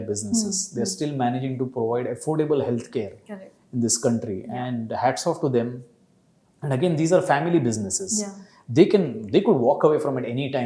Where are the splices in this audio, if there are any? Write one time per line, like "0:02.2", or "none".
none